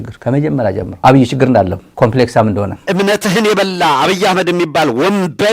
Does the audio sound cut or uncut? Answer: cut